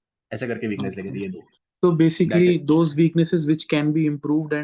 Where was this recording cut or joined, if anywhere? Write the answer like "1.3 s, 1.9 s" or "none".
none